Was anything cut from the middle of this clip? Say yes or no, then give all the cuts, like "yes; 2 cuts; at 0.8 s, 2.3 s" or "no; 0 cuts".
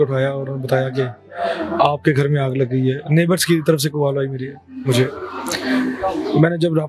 no; 0 cuts